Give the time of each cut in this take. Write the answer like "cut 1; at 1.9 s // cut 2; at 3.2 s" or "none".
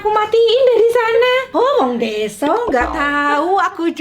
cut 1; at 1.5 s